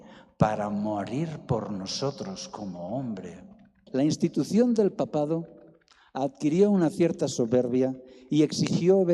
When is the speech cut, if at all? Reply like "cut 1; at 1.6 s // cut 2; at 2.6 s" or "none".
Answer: cut 1; at 3.8 s